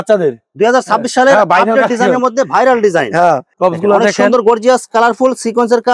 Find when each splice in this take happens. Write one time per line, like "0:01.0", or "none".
0:03.5